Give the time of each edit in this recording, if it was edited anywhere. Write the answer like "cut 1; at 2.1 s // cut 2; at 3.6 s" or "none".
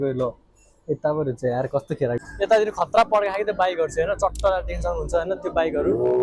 cut 1; at 2.2 s